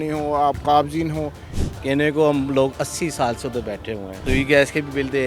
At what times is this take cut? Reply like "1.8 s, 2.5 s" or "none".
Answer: 1.5 s, 4.1 s